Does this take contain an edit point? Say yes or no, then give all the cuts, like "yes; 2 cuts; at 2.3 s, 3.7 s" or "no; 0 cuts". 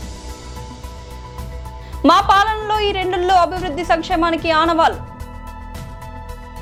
no; 0 cuts